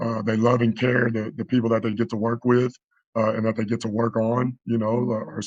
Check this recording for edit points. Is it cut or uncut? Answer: uncut